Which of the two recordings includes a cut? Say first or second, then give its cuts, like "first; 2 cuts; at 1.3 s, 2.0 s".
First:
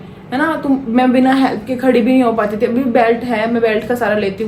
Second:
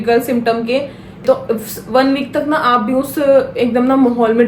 second; 1 cut; at 1.2 s